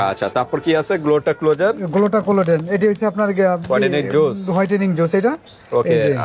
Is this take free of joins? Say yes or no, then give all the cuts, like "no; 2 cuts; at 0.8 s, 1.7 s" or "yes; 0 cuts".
yes; 0 cuts